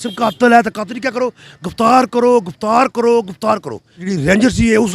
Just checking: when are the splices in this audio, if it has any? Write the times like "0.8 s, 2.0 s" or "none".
4.0 s